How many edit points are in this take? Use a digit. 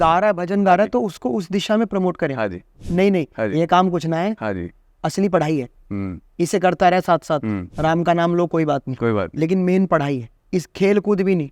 1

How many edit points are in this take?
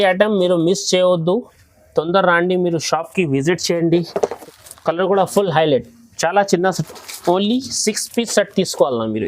1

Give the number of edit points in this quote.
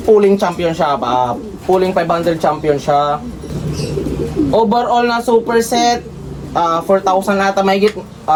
0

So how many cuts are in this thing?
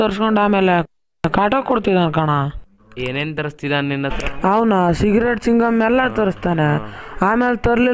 1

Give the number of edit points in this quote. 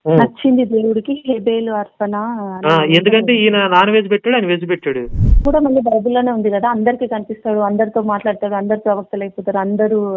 1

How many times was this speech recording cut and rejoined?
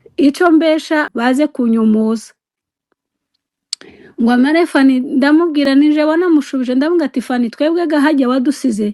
1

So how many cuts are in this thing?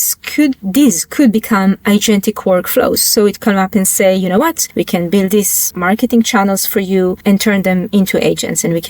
3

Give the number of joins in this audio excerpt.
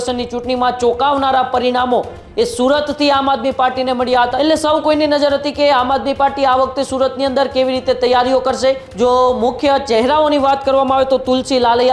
2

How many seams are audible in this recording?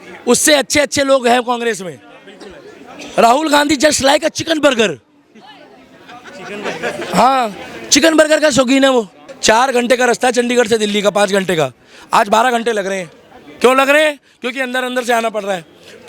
1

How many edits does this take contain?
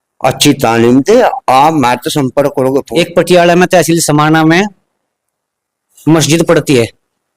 1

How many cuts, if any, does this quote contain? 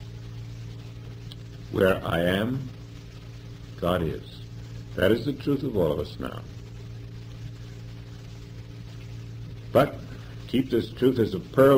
0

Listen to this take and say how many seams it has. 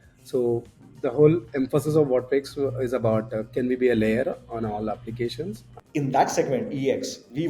1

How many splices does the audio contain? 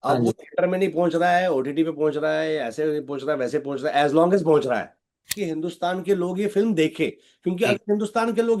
1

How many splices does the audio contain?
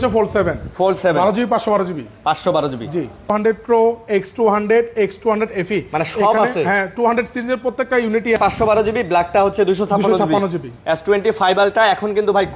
2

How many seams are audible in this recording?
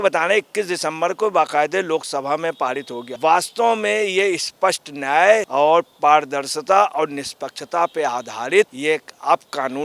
3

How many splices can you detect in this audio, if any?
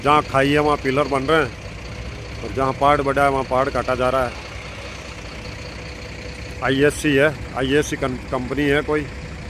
0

